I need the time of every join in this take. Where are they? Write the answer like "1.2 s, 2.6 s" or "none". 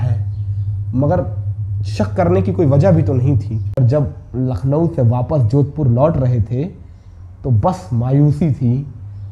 3.8 s